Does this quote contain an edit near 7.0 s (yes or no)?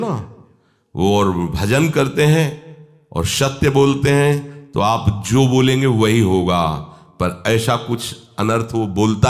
no